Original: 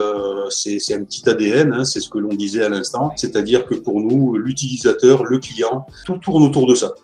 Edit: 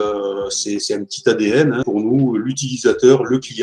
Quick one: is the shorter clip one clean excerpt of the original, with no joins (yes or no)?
no